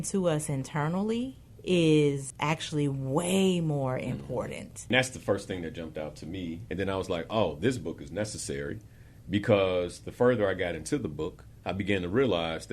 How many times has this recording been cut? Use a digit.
3